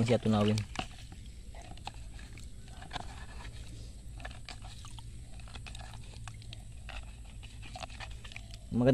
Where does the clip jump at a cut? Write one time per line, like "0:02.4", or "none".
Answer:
none